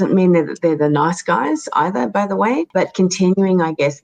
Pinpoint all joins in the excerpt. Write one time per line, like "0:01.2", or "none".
0:02.7